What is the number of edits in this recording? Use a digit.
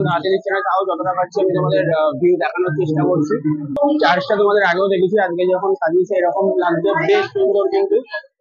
1